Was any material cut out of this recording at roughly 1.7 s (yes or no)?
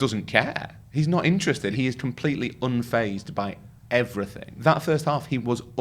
yes